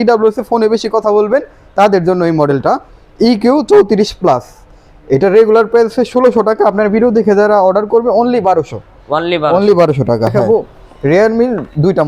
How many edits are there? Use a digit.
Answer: 1